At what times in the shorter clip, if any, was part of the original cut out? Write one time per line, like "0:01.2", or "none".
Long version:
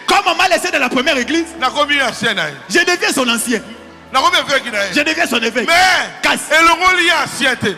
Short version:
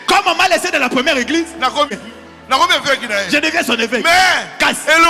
0:02.0